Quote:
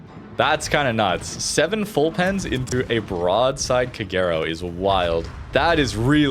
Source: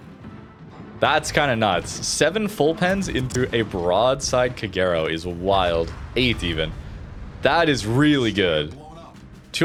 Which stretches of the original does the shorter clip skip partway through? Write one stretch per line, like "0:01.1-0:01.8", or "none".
0:06.0-0:07.3